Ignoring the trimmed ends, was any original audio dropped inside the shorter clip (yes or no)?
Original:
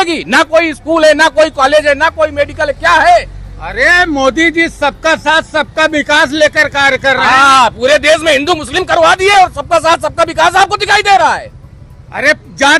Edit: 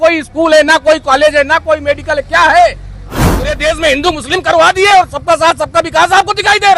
yes